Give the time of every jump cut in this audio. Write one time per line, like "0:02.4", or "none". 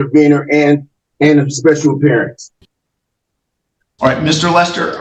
none